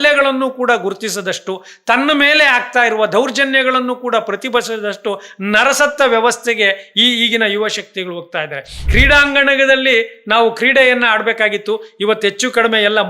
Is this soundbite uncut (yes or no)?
no